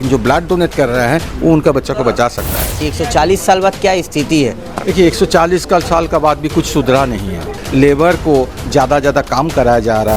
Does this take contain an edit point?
yes; 2 cuts; at 2.9 s, 7.6 s

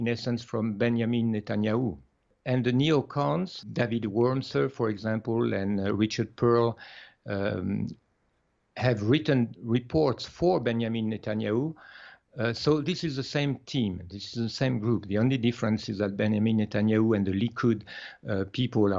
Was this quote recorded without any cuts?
no; 1 cut; at 2.3 s

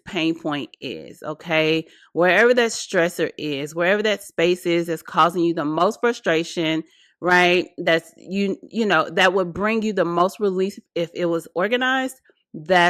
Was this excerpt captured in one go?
yes; 0 cuts

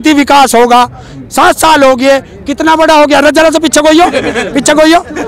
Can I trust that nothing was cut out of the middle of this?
yes; 0 cuts

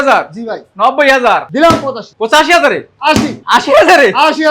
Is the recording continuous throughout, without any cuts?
no; 2 cuts; at 1.7 s, 3.4 s

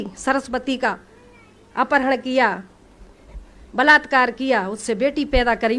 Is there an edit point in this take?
no; 0 cuts

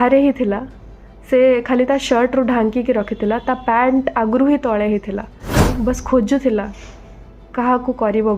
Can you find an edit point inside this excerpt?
yes; 1 cut; at 5.5 s

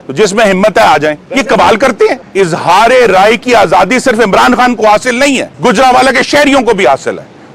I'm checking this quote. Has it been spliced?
yes; 3 cuts; at 1.3 s, 2.2 s, 5.5 s

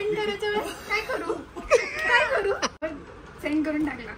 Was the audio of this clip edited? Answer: yes; 1 cut; at 2.8 s

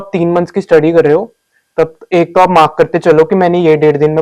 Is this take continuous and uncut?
yes; 0 cuts

